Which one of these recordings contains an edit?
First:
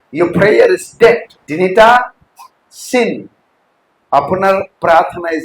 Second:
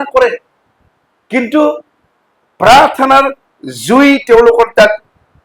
first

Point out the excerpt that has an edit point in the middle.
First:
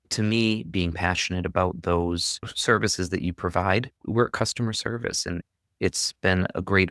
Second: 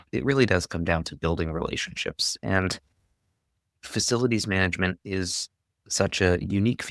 first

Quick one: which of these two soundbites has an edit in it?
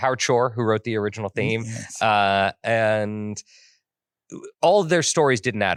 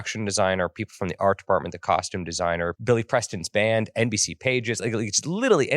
second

